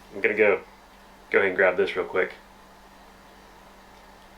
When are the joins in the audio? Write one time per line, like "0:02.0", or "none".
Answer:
none